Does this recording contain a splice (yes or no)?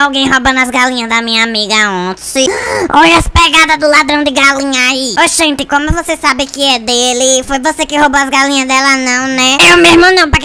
no